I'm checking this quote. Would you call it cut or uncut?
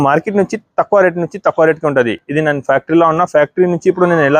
uncut